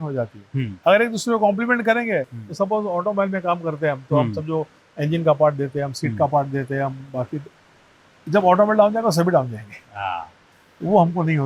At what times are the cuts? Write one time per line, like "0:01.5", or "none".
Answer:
none